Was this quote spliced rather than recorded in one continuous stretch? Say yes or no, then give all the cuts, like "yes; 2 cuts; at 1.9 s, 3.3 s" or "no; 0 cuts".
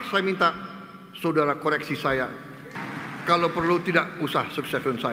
yes; 1 cut; at 2.7 s